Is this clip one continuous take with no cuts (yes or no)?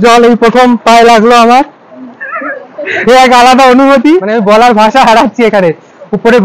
no